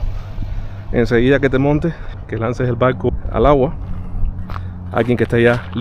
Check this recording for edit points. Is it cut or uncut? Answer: cut